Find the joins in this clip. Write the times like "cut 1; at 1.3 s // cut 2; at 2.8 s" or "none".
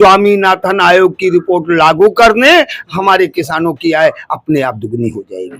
none